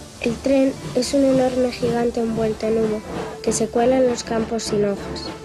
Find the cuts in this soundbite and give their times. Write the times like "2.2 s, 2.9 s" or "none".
3.3 s